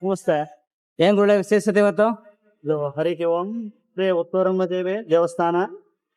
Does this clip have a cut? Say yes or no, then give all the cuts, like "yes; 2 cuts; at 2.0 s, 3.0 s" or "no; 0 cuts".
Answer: no; 0 cuts